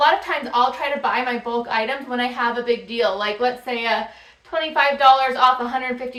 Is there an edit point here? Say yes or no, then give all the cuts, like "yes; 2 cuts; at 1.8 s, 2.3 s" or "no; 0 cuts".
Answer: no; 0 cuts